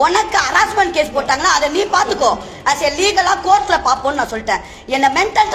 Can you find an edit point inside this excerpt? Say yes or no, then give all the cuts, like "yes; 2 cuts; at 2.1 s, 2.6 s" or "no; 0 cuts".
no; 0 cuts